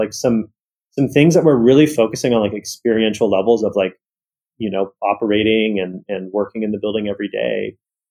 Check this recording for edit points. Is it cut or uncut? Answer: uncut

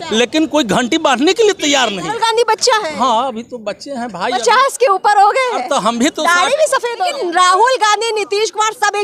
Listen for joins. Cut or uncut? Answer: cut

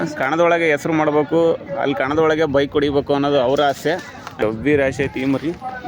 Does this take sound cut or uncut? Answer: cut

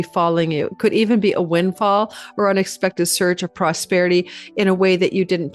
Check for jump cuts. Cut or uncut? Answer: uncut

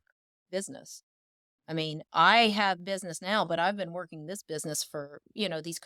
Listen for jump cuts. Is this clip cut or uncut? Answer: uncut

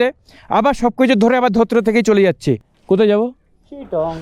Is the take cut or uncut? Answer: cut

